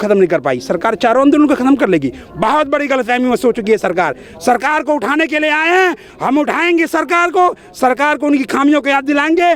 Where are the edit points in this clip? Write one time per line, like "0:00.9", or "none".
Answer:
none